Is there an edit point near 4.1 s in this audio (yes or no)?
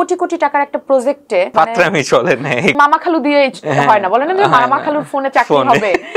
no